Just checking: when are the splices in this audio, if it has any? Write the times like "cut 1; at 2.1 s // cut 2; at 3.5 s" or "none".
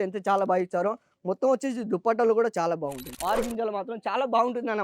cut 1; at 3.1 s